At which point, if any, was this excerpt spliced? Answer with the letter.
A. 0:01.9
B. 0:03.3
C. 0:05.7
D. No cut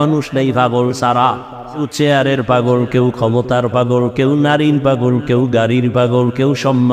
A